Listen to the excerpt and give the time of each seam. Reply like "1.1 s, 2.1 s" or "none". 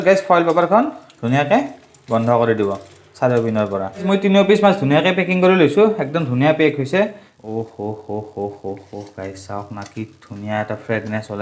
4.0 s, 7.2 s